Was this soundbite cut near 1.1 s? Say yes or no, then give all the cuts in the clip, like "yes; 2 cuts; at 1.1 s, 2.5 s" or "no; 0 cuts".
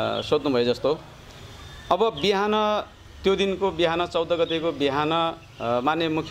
no; 0 cuts